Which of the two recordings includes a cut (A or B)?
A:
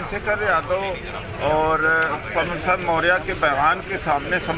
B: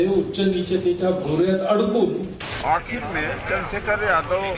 B